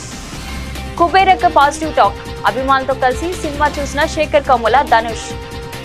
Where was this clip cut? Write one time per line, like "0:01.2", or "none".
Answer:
none